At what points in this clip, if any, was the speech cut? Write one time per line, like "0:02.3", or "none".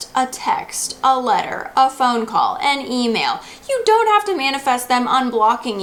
none